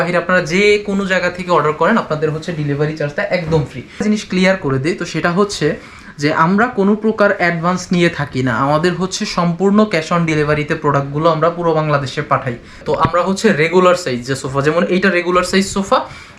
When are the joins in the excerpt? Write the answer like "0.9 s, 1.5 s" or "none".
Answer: 4.0 s, 12.7 s